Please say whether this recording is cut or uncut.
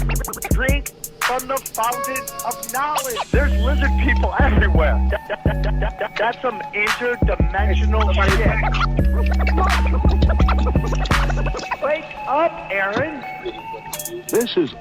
cut